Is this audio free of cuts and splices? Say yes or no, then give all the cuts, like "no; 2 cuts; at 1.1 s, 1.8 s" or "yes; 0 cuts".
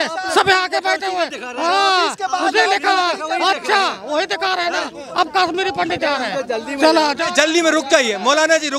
yes; 0 cuts